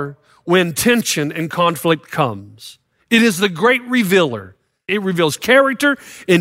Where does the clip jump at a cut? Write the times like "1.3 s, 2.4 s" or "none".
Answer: 4.8 s

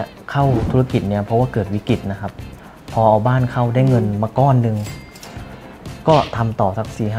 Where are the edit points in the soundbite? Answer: 2.2 s

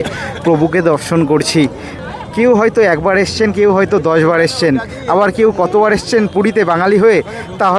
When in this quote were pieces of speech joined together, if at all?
2.1 s

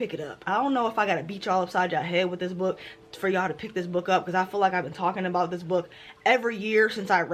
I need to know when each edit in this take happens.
none

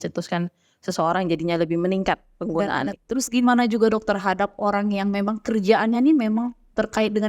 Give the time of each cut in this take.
3.0 s

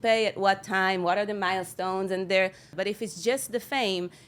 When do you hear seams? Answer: 2.7 s

